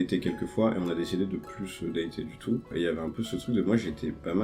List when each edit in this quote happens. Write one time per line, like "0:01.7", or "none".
0:02.7